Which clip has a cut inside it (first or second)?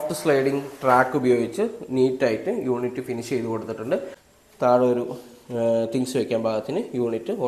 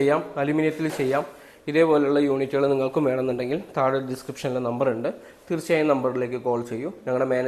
first